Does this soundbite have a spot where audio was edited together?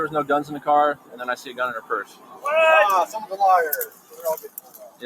no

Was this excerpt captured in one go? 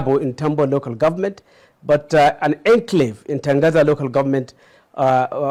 yes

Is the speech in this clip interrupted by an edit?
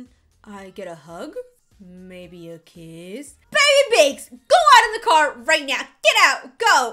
yes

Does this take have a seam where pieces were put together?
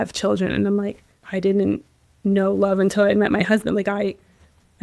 no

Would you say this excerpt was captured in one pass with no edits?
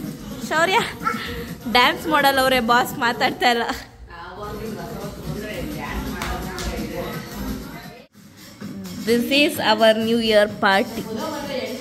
no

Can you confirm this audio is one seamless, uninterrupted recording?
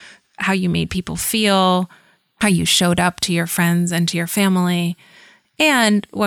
yes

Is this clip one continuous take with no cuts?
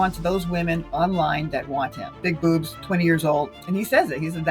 no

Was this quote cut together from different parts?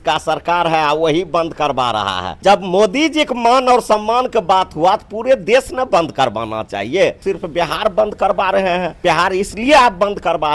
yes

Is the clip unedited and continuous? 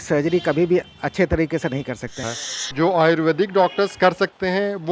no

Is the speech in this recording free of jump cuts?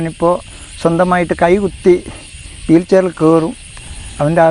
yes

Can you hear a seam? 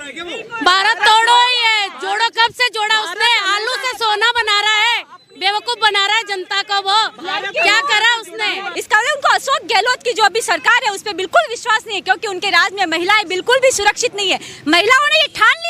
yes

